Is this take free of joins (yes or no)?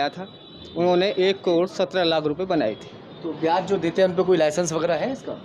yes